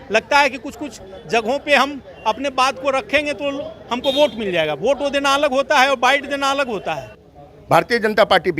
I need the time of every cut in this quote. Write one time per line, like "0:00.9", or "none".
0:07.2